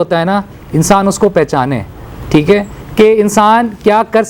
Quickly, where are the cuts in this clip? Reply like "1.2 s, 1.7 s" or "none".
none